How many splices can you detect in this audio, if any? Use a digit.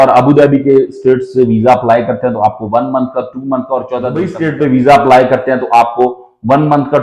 1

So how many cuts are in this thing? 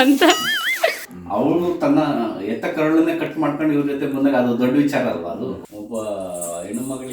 2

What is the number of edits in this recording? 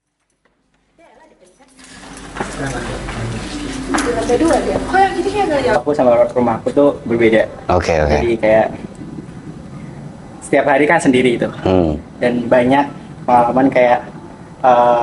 1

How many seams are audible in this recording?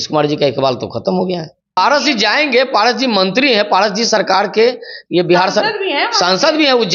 1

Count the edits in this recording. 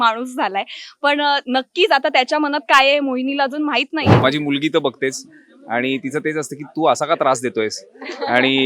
1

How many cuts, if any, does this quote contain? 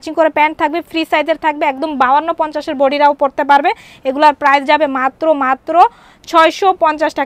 0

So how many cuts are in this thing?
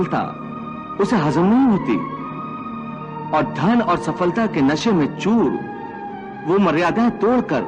0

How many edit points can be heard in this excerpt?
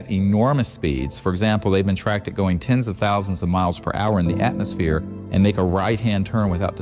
0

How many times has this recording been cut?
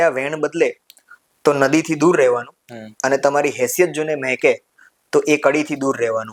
0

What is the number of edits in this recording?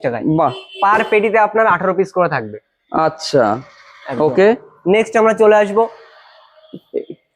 0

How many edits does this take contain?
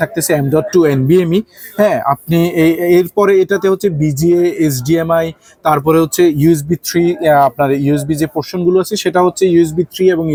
0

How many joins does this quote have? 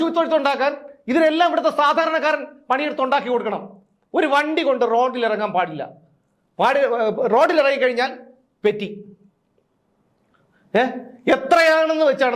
0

